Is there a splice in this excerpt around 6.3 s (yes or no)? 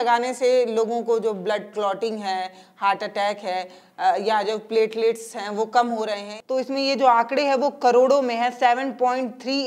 yes